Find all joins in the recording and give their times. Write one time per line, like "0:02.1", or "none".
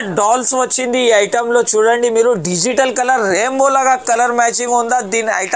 none